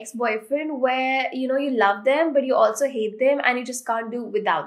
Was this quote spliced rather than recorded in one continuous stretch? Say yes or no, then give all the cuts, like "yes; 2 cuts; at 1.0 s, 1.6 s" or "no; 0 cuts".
no; 0 cuts